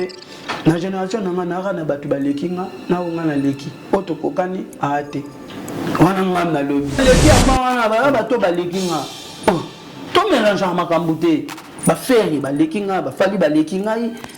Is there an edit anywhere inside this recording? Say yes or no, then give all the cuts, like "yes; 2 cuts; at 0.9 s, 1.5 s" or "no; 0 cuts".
yes; 1 cut; at 7.0 s